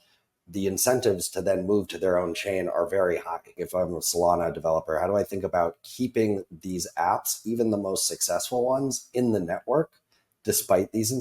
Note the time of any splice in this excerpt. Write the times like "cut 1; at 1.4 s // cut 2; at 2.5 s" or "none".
cut 1; at 3.6 s

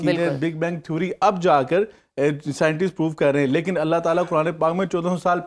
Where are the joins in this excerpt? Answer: none

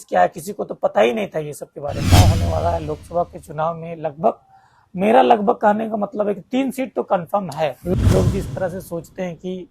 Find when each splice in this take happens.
cut 1; at 2.0 s // cut 2; at 7.9 s

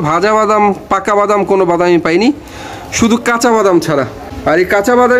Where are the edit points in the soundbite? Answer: cut 1; at 4.2 s

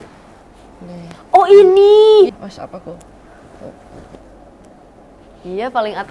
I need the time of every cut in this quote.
cut 1; at 2.3 s

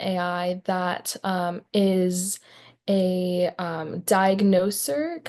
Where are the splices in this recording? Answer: none

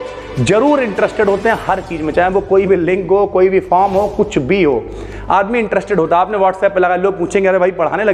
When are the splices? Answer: none

